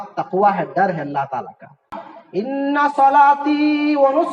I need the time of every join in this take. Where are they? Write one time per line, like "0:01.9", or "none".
0:02.0